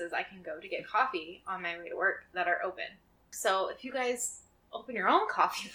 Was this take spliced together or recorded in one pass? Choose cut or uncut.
cut